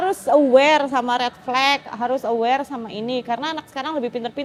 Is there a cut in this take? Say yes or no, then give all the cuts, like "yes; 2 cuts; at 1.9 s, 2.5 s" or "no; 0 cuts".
no; 0 cuts